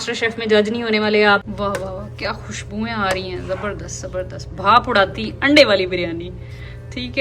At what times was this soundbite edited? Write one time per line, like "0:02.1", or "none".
0:01.5